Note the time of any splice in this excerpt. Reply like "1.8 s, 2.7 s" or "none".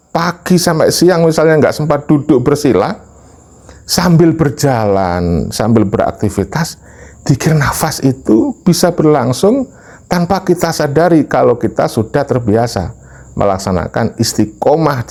none